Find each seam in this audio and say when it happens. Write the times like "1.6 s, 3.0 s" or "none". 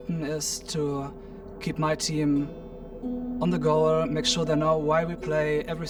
none

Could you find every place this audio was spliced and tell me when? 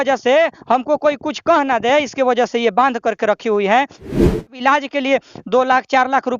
4.1 s

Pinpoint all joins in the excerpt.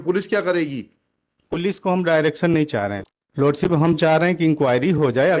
3.0 s

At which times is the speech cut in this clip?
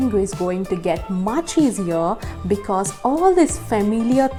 none

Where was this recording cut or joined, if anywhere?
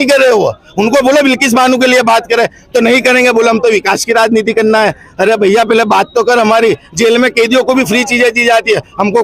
none

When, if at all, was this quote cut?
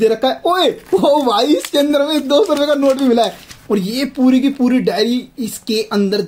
3.4 s

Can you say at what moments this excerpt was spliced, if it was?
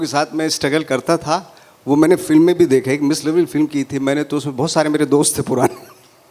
none

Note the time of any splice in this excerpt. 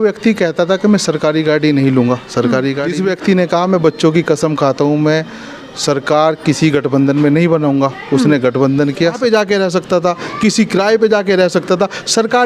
2.9 s, 9.2 s

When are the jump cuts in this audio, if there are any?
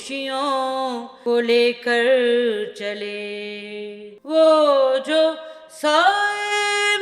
1.1 s, 4.1 s

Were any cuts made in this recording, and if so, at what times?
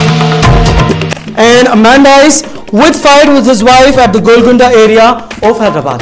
none

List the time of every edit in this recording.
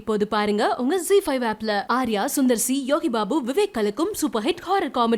none

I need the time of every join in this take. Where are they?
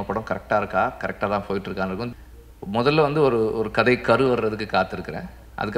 2.1 s

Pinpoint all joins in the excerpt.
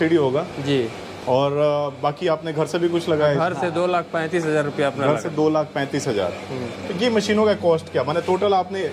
none

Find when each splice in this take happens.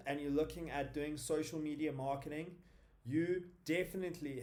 none

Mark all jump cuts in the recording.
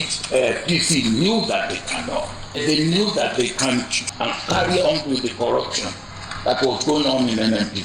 2.6 s, 4.1 s

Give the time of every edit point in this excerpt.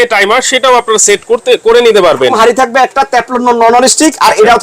2.3 s

